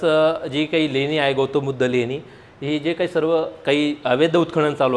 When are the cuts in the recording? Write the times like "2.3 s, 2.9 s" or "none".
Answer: none